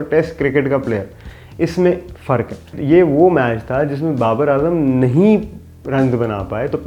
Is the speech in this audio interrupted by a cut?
yes; 1 cut; at 2.7 s

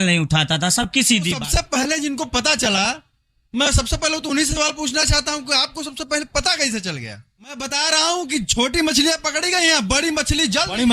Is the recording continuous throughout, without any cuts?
no; 2 cuts; at 1.4 s, 7.7 s

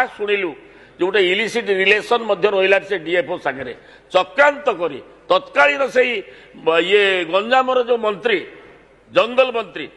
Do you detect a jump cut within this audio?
no; 0 cuts

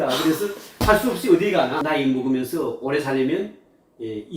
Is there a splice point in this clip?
yes; 1 cut; at 1.8 s

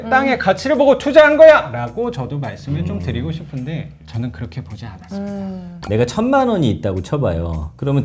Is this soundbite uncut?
no; 2 cuts; at 4.0 s, 5.7 s

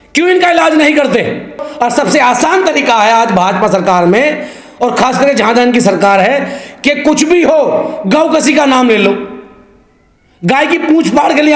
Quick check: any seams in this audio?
yes; 1 cut; at 1.7 s

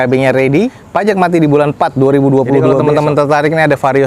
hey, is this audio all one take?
no; 1 cut; at 2.7 s

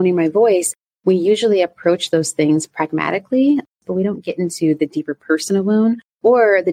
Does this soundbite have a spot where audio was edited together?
yes; 1 cut; at 3.7 s

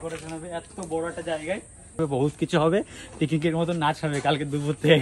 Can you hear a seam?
yes; 1 cut; at 2.0 s

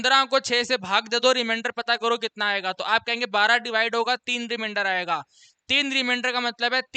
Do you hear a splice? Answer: no; 0 cuts

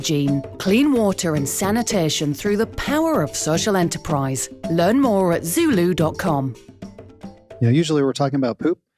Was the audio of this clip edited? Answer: yes; 1 cut; at 7.5 s

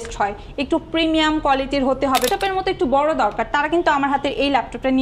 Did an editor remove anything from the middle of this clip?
yes; 1 cut; at 2.3 s

